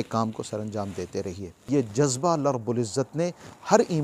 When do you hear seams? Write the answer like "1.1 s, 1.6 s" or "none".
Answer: 1.5 s

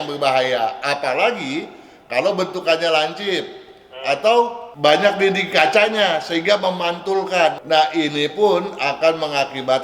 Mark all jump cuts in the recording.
4.7 s, 7.6 s

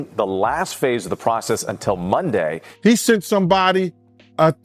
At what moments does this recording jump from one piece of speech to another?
2.7 s

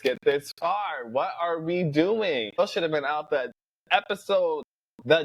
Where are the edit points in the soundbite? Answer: 2.6 s

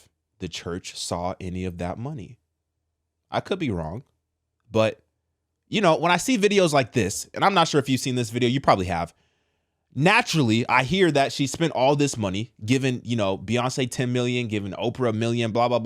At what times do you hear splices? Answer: none

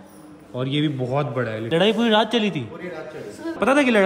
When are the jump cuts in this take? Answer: 1.6 s

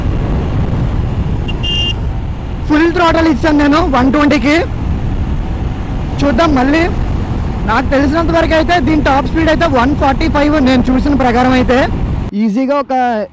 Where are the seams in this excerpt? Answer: 12.2 s

